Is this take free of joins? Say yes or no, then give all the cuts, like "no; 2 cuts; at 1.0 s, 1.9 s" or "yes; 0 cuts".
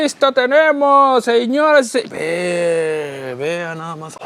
yes; 0 cuts